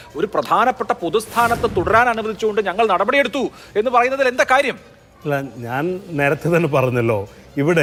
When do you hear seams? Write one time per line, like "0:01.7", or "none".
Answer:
none